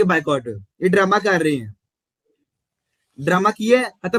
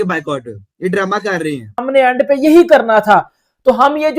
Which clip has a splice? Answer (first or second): second